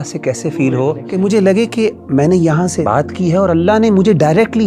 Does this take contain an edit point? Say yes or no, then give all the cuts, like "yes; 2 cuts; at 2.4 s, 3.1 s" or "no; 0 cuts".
yes; 2 cuts; at 1.0 s, 2.8 s